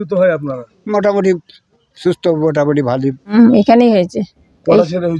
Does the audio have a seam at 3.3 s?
yes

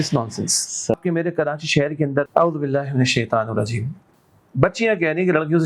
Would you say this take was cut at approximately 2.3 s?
yes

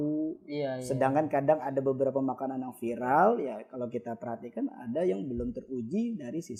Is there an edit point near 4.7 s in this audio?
no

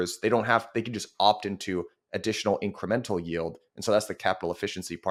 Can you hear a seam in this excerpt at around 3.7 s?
no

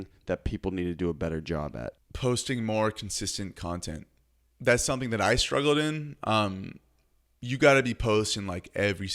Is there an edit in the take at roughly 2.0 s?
yes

